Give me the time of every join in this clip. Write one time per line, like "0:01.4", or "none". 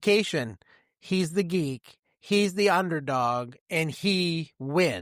none

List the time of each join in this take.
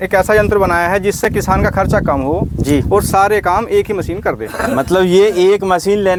none

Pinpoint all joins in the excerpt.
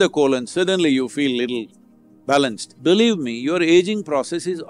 0:02.7

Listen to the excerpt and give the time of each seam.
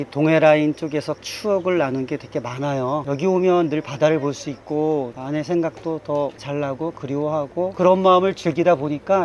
0:01.3
0:03.0

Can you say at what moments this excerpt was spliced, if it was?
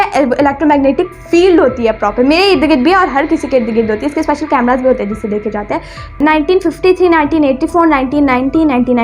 0:06.2

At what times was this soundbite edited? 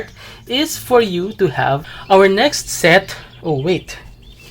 0:01.9

